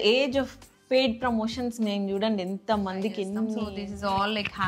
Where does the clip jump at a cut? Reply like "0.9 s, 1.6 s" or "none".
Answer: 3.5 s